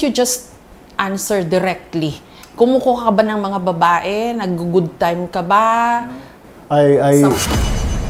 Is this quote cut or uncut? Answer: uncut